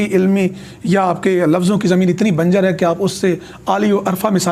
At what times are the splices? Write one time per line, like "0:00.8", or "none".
none